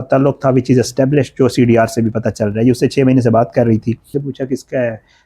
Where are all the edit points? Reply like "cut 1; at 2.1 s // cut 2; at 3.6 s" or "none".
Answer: cut 1; at 4.2 s